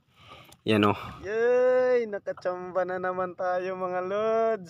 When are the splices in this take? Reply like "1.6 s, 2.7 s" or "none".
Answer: 1.1 s

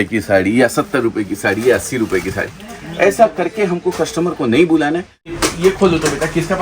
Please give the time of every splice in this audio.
5.2 s

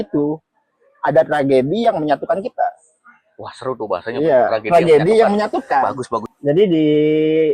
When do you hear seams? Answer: 6.2 s

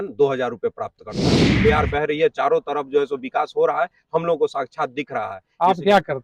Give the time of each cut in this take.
1.5 s

